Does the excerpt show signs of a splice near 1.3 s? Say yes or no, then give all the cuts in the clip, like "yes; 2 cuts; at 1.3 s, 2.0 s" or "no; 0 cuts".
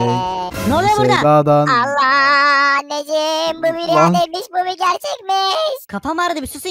no; 0 cuts